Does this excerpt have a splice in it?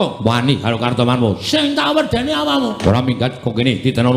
yes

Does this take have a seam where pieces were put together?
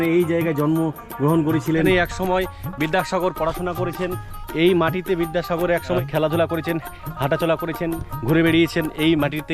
yes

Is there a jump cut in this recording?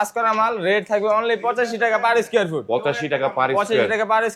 no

